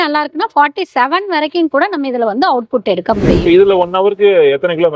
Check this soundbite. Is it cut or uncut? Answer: cut